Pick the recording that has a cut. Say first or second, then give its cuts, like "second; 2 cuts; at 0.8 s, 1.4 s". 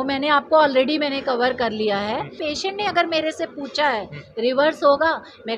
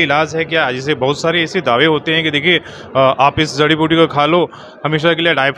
first; 1 cut; at 2.4 s